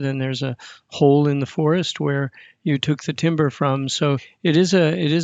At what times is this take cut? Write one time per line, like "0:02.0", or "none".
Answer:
0:04.3